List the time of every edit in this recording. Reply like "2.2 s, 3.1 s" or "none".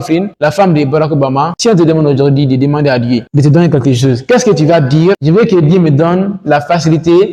none